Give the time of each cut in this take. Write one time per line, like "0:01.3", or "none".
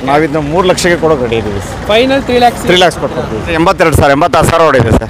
0:03.5